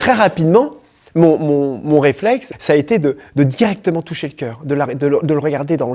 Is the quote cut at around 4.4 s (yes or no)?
no